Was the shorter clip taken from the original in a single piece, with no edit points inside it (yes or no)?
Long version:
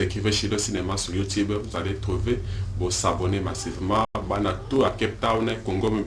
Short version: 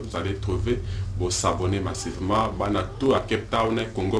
no